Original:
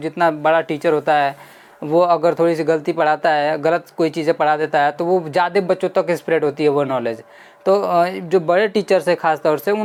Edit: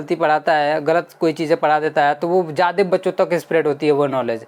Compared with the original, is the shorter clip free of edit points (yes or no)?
yes